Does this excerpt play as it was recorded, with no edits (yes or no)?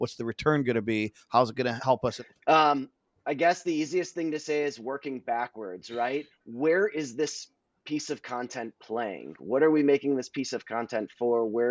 no